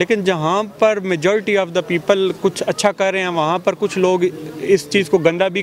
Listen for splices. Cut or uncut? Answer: uncut